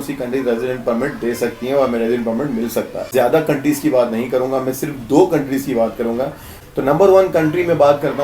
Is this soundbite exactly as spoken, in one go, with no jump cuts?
no; 2 cuts; at 3.1 s, 6.5 s

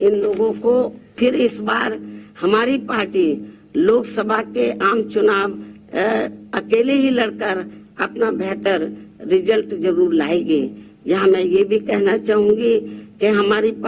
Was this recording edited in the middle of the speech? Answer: yes; 1 cut; at 1.0 s

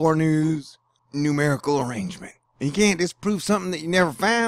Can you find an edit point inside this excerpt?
yes; 1 cut; at 2.4 s

